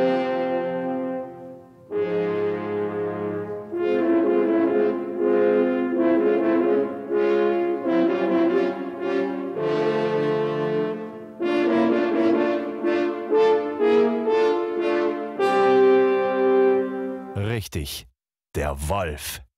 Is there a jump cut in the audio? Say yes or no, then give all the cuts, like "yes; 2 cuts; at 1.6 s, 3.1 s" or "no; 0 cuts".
yes; 1 cut; at 17.1 s